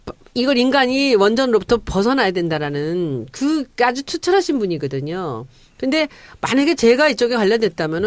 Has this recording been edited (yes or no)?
yes